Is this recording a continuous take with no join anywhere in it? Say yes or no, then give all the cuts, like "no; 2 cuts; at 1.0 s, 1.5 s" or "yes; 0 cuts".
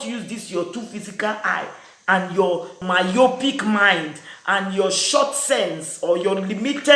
no; 1 cut; at 2.8 s